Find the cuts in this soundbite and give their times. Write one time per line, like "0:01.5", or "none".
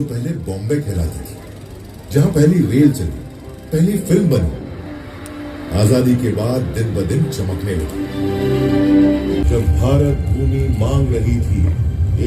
0:09.4